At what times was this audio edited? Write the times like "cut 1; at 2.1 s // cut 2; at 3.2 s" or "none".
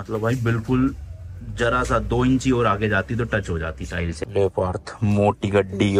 cut 1; at 4.2 s